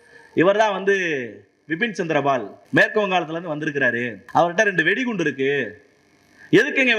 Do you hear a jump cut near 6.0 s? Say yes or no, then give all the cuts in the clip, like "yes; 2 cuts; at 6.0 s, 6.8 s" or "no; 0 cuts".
no; 2 cuts; at 2.6 s, 4.2 s